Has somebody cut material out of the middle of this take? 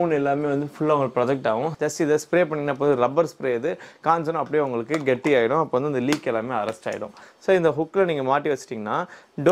yes; 2 cuts; at 1.7 s, 7.2 s

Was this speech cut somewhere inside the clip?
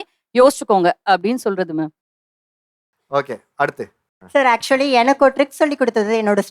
no; 0 cuts

